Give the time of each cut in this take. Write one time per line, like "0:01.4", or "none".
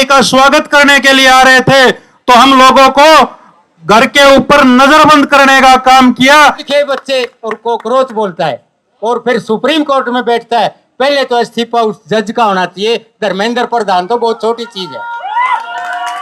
0:06.6